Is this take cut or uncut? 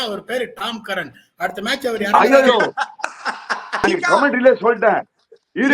cut